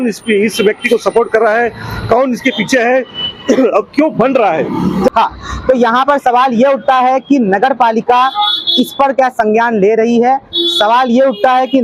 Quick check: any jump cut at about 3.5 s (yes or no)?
no